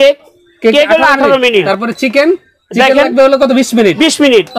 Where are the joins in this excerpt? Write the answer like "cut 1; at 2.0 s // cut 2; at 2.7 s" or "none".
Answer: cut 1; at 1.6 s